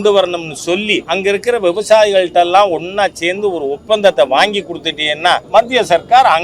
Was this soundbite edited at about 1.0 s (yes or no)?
yes